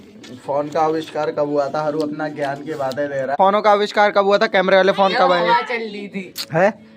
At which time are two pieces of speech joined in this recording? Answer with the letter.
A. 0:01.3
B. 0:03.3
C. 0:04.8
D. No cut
B